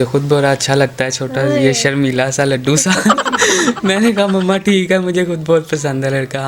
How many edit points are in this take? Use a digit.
0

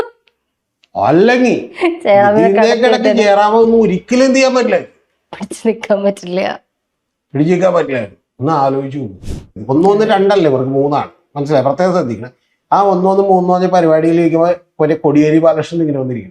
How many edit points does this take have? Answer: 1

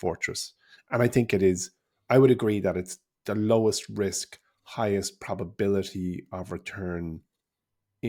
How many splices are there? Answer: 0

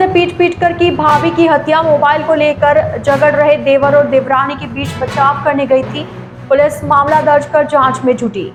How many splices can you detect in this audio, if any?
0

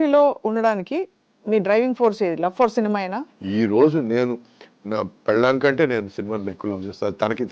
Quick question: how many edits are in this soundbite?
1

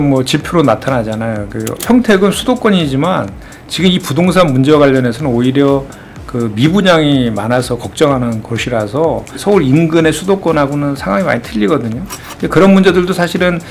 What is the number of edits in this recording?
2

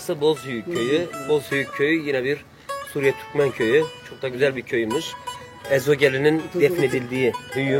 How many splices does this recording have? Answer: 2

